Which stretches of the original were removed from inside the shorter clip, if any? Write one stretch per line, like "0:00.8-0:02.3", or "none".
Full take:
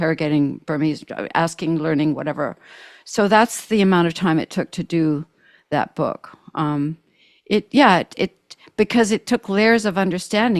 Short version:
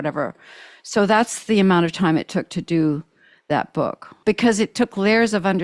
0:06.3-0:08.6